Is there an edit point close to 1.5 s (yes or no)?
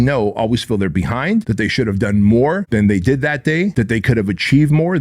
yes